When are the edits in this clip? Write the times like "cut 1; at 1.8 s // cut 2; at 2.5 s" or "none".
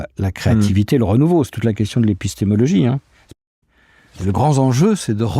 cut 1; at 3.6 s